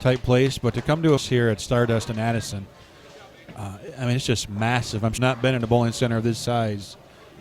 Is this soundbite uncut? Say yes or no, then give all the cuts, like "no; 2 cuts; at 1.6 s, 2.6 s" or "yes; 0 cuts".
no; 2 cuts; at 1.2 s, 5.1 s